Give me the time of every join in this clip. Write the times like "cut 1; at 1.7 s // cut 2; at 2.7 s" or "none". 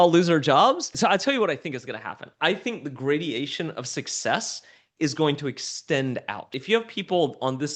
cut 1; at 1.0 s // cut 2; at 6.6 s